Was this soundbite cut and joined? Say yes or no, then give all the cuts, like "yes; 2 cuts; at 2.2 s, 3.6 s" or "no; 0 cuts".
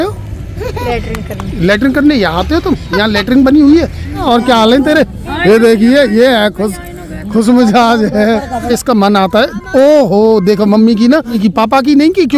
yes; 3 cuts; at 4.2 s, 8.7 s, 11.4 s